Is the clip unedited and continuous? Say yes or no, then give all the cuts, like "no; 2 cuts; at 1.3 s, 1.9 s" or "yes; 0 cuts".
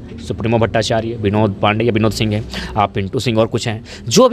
yes; 0 cuts